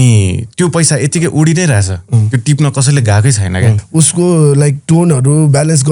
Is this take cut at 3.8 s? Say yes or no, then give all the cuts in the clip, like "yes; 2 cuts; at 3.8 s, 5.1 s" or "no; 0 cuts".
yes; 1 cut; at 3.8 s